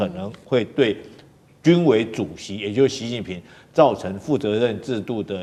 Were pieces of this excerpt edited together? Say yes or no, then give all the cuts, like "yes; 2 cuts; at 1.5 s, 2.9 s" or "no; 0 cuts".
no; 0 cuts